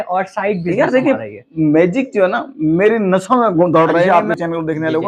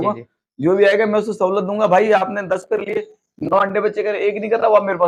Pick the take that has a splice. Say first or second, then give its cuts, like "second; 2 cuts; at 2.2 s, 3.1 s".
first; 1 cut; at 4.1 s